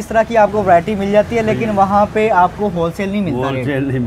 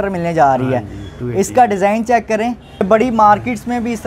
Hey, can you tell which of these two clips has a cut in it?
second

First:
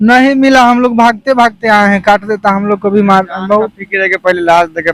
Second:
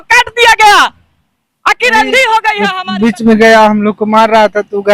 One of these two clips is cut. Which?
second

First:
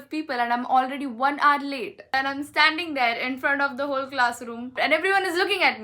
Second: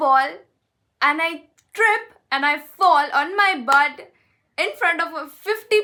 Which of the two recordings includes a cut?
first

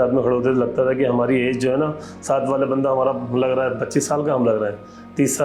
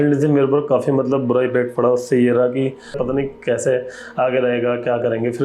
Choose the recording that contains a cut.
second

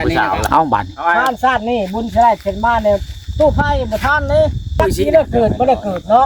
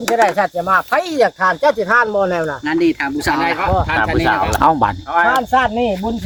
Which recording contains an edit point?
first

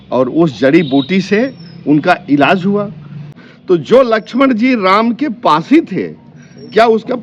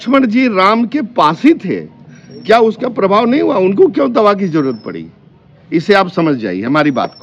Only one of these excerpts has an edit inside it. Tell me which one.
first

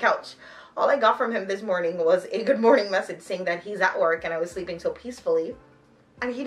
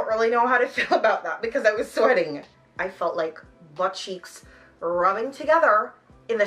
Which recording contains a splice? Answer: second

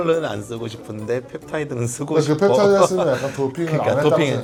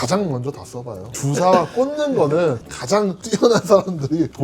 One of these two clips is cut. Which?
second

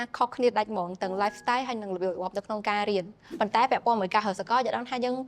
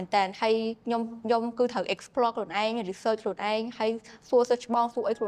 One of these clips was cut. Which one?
first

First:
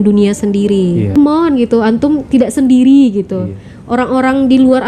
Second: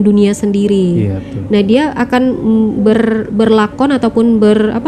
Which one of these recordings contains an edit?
first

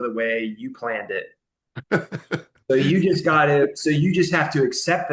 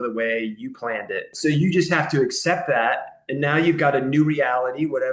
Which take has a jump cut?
second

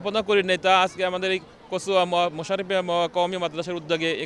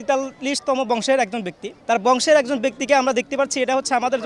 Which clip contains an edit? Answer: second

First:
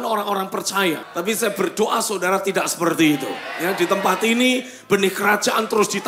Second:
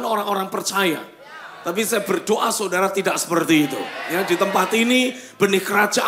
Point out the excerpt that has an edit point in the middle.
first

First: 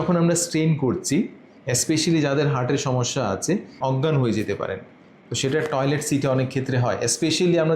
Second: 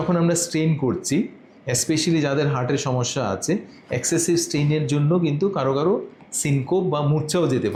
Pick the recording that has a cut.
first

